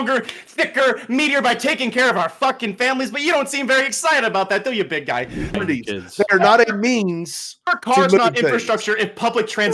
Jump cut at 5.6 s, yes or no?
yes